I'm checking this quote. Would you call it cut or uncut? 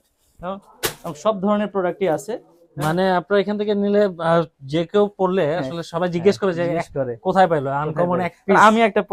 uncut